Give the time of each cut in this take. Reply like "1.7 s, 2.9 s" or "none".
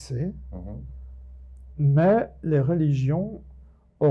1.7 s